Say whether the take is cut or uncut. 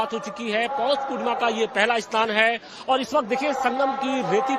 uncut